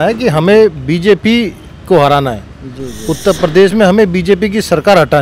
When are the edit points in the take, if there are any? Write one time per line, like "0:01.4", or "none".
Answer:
none